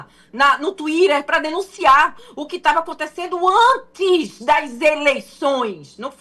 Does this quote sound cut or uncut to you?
uncut